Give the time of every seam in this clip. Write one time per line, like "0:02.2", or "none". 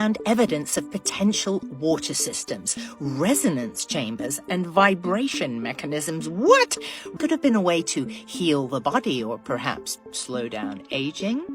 0:07.1